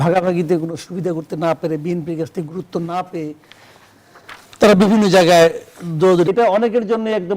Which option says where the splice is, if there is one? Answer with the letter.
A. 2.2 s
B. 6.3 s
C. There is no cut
B